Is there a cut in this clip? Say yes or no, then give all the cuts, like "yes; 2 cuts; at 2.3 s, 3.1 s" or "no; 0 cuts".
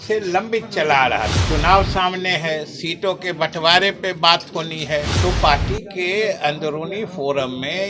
yes; 2 cuts; at 1.4 s, 5.1 s